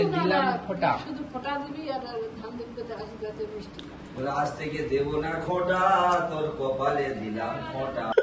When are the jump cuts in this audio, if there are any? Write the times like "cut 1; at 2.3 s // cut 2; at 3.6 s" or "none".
none